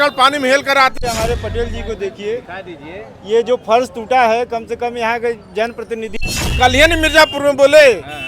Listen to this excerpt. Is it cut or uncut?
cut